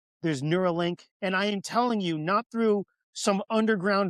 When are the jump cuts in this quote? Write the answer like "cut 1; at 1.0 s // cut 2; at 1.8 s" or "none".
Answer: cut 1; at 1.1 s